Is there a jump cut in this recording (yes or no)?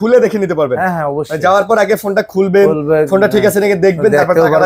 no